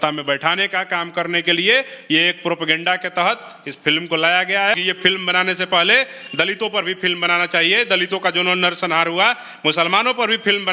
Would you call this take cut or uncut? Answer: cut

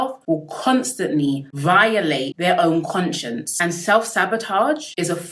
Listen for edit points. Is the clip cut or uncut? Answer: uncut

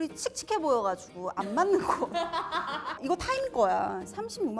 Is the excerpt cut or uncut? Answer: uncut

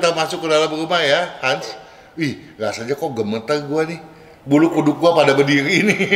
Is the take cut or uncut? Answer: uncut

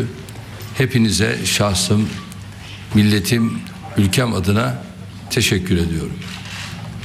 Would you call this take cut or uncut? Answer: cut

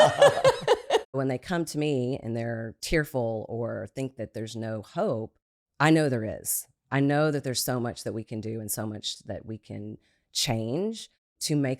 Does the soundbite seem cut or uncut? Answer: cut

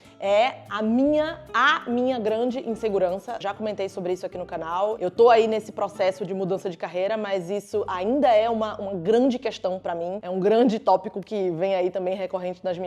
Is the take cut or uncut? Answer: uncut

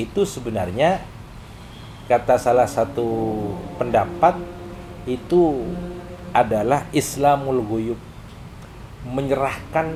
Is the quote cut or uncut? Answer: uncut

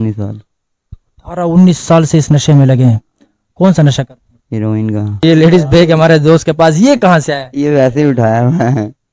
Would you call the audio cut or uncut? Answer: cut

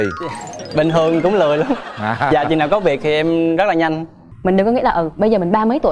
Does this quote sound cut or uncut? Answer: cut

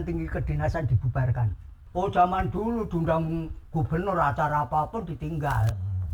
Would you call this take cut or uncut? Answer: cut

